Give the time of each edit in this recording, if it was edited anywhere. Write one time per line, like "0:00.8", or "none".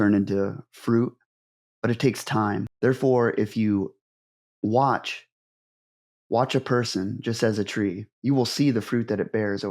0:02.7